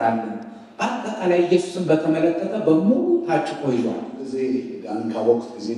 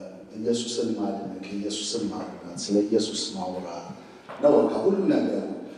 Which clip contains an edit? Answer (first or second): first